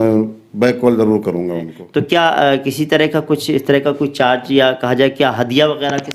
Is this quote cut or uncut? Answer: cut